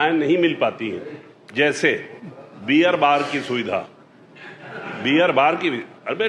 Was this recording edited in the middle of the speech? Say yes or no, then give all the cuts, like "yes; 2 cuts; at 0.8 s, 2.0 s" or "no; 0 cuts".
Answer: no; 0 cuts